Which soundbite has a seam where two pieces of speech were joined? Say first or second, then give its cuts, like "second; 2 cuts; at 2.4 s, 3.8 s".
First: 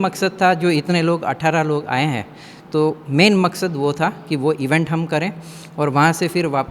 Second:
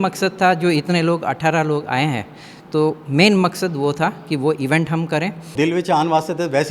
second; 1 cut; at 5.5 s